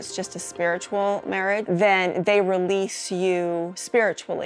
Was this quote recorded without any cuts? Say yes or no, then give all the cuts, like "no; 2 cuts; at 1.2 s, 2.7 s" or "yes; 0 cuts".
no; 1 cut; at 1.6 s